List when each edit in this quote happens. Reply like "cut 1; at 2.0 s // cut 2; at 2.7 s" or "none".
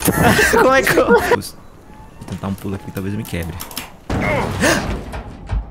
cut 1; at 1.3 s